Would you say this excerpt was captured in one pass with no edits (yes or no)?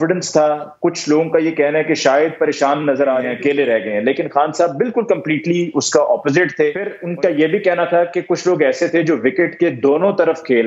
no